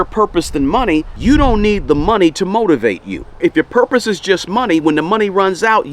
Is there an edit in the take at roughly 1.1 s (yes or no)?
yes